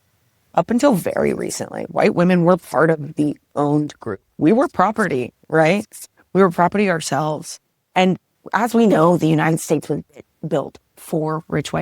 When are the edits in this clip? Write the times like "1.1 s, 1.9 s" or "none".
8.3 s